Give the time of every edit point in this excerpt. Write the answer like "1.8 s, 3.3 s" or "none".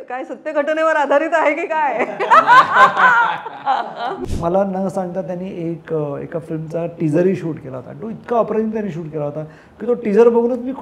4.2 s